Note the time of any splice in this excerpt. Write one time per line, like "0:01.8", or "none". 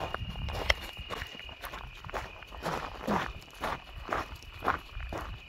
none